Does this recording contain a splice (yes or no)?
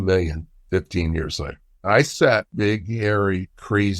yes